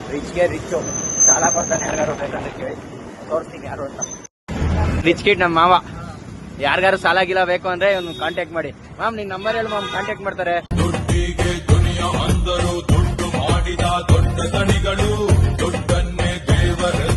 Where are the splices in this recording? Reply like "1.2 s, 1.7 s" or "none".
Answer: none

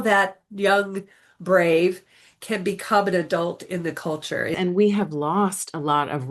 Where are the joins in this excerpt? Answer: 4.5 s

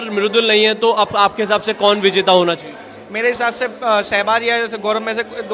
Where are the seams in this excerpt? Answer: none

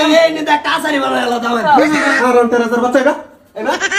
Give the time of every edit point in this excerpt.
2.2 s

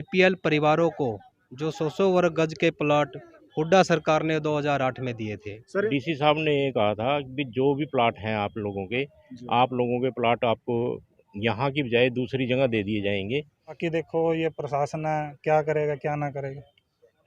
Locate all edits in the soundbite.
5.9 s, 13.8 s

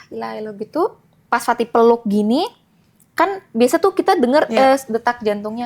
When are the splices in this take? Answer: 1.2 s

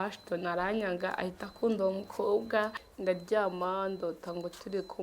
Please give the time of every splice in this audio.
2.8 s

